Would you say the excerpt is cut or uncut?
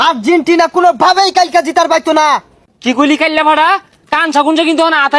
cut